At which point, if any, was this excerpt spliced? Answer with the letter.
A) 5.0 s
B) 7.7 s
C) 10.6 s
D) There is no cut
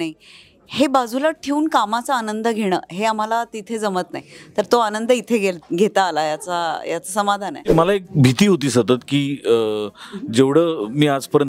B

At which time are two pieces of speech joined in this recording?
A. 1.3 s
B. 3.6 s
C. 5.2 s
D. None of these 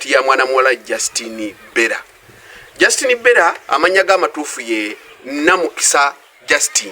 B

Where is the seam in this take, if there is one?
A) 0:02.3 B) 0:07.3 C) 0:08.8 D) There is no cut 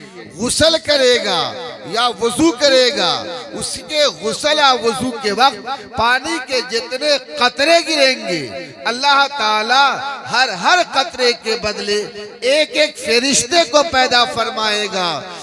D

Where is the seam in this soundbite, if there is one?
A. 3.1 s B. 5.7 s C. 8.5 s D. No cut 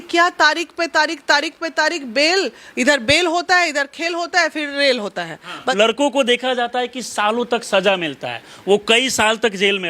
B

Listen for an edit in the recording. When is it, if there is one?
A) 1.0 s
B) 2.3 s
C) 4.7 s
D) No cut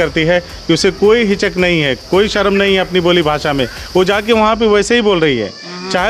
D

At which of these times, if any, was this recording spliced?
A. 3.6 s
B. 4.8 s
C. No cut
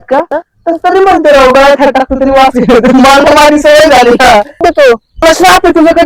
B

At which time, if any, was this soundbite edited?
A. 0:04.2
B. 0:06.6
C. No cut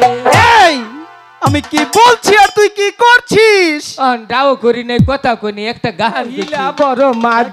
B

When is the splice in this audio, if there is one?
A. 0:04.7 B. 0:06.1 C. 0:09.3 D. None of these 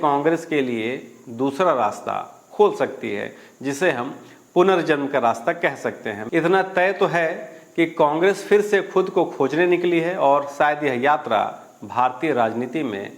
B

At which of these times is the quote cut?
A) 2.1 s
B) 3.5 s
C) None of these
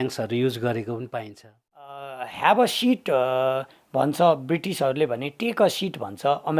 A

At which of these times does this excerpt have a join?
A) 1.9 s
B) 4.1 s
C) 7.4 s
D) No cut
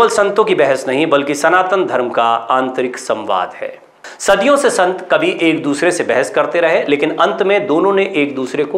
B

